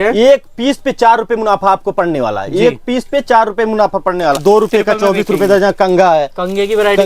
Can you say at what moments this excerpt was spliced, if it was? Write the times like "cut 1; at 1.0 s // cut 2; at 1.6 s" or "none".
cut 1; at 4.4 s